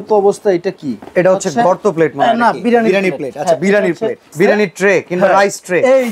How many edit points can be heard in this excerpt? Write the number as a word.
one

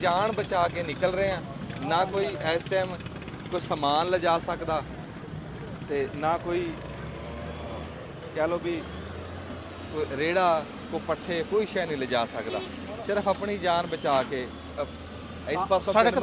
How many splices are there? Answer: zero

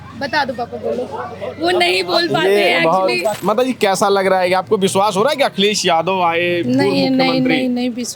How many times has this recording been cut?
one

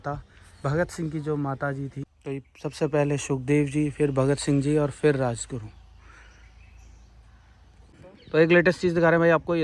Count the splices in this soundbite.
two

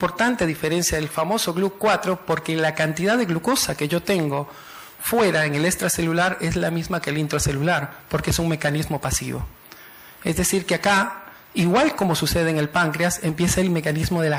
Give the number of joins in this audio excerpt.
zero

